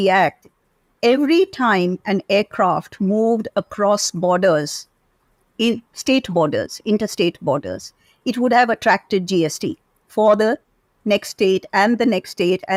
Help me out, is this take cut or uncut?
uncut